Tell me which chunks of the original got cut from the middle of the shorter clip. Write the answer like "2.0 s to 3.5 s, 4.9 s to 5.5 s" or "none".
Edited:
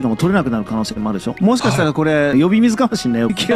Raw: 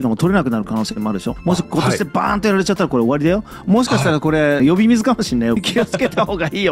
1.3 s to 3.5 s